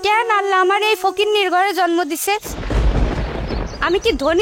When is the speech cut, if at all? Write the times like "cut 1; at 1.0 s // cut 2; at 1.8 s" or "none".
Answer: none